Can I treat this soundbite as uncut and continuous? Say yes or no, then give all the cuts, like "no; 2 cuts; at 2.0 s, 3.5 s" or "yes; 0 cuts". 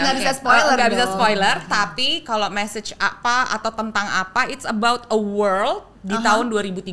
yes; 0 cuts